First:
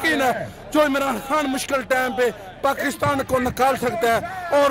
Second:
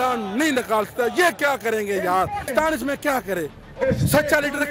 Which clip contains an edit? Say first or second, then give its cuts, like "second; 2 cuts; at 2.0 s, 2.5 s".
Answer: second; 1 cut; at 2.5 s